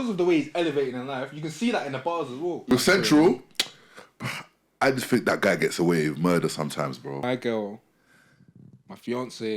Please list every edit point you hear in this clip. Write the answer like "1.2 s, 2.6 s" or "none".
2.7 s, 7.2 s